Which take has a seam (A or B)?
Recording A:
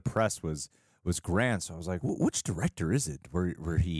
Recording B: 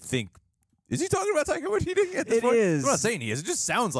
A